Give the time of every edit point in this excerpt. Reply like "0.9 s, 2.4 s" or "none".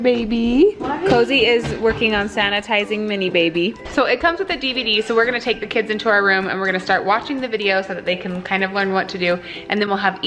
none